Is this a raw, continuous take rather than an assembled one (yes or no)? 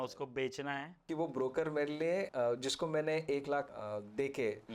no